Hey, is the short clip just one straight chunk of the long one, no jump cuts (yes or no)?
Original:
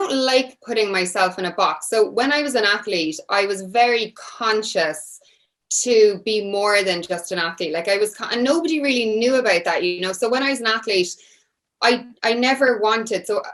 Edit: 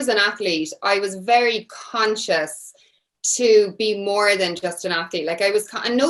yes